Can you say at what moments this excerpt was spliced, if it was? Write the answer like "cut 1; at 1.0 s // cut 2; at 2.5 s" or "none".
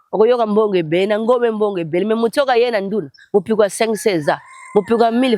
none